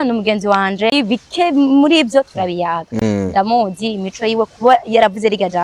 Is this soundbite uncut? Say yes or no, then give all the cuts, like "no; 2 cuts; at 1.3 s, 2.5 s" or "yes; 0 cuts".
no; 1 cut; at 0.9 s